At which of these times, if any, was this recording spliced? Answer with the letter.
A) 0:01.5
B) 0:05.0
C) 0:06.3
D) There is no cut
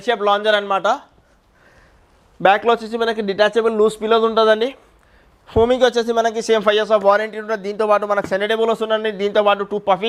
D